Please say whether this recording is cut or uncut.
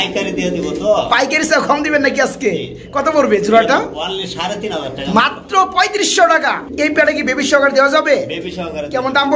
cut